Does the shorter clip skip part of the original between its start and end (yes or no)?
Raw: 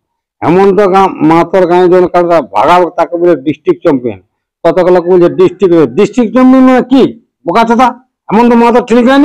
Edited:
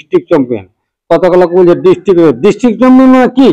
no